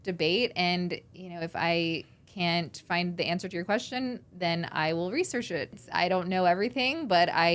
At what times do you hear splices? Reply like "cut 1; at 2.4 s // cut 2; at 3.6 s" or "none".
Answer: cut 1; at 5.8 s